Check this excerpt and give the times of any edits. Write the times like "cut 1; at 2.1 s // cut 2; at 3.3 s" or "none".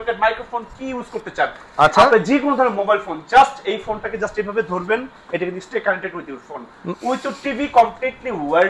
none